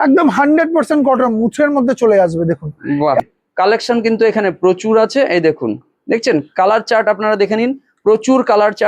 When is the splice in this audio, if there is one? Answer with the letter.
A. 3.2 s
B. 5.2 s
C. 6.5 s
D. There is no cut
A